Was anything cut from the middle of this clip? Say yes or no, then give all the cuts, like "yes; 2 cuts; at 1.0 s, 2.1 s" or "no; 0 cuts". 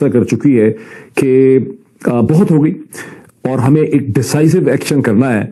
no; 0 cuts